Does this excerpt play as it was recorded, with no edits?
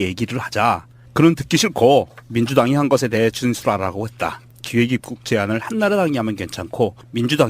no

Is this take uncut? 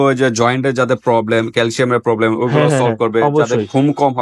yes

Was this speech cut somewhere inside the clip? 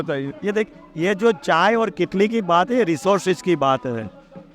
no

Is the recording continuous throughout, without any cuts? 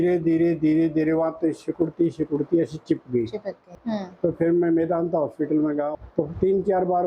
no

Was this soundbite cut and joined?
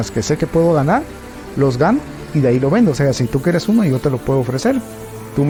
no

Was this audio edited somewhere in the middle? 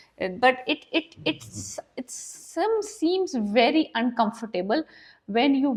no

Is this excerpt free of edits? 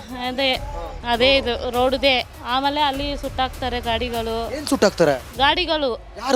no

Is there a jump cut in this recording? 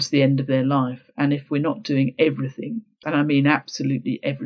yes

